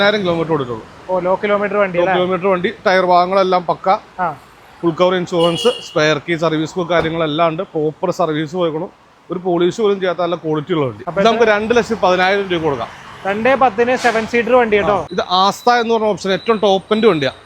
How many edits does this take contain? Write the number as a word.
two